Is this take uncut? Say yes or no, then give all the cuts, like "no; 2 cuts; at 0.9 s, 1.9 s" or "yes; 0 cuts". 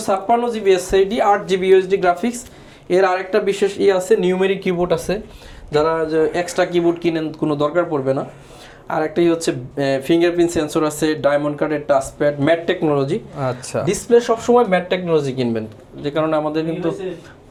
yes; 0 cuts